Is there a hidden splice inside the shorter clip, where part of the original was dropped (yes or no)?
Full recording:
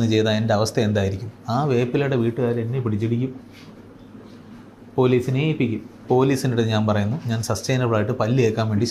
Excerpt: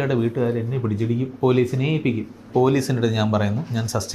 yes